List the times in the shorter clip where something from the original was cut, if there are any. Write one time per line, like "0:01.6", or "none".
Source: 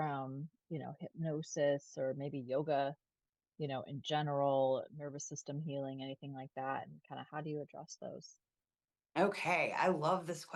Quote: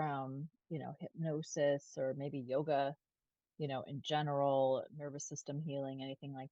none